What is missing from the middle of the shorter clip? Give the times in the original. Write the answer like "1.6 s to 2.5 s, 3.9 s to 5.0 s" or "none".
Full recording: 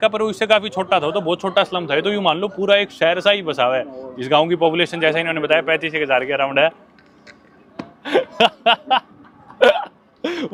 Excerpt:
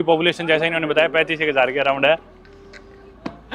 none

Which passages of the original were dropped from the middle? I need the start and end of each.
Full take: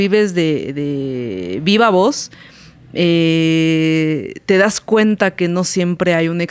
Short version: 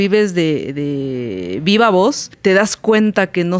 2.3 s to 4.3 s

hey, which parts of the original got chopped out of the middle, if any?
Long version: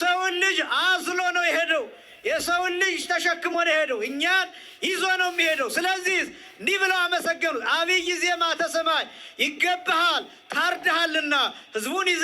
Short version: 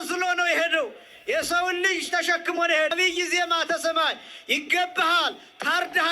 3.9 s to 7.8 s

